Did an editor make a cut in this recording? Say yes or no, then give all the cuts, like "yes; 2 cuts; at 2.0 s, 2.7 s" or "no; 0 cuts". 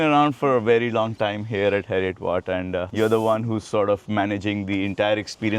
no; 0 cuts